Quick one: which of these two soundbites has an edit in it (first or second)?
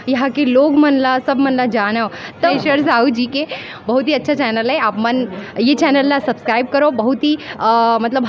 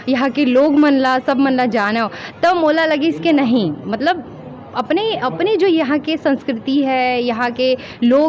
first